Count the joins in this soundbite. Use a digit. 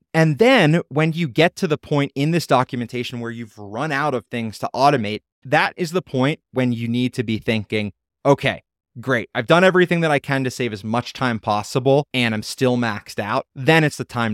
3